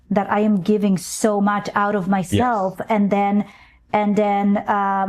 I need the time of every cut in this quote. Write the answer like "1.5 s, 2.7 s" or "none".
none

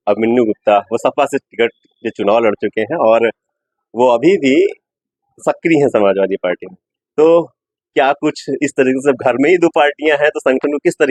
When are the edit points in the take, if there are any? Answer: none

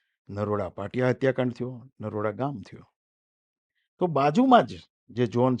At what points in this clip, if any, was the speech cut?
none

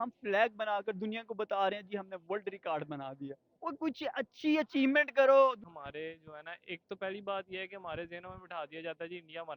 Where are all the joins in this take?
5.7 s

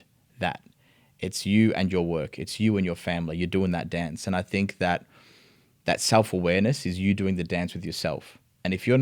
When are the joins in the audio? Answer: none

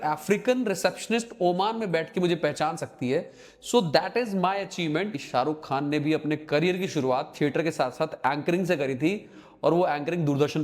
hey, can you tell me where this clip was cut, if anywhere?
5.2 s

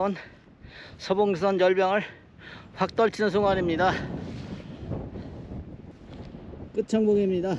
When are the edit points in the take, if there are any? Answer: 5.9 s

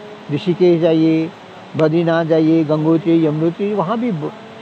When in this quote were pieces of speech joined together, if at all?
none

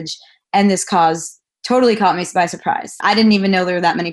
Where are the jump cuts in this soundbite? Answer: 3.0 s

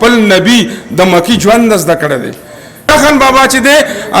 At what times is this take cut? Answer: 2.9 s

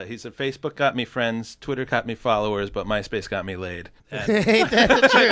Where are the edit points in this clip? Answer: 3.9 s

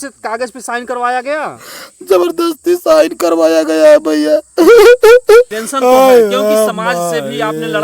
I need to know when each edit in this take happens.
5.5 s

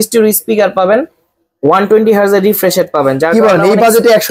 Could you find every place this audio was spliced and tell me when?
none

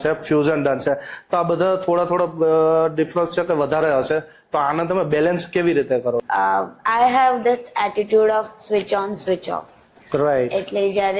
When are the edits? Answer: 6.2 s

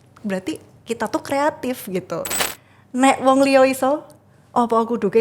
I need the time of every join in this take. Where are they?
2.2 s

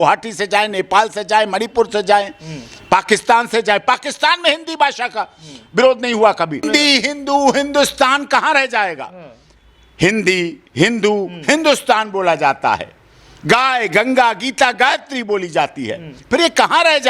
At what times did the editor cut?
6.6 s

